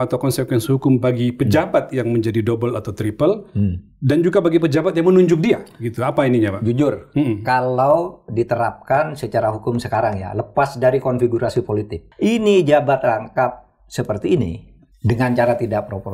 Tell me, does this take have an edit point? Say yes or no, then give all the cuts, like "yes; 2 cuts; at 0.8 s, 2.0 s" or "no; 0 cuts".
yes; 1 cut; at 12.0 s